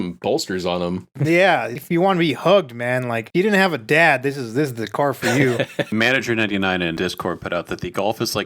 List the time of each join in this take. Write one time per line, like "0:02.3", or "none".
0:01.1
0:01.8
0:05.9
0:07.0